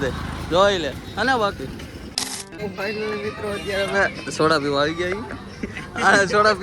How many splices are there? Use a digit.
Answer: 1